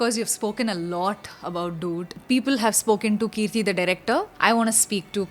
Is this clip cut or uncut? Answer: cut